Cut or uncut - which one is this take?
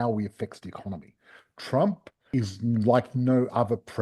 cut